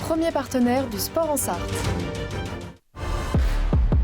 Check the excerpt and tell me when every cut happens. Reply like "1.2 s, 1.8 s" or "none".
3.1 s